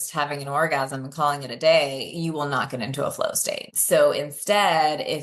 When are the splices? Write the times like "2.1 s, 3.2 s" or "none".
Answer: 3.7 s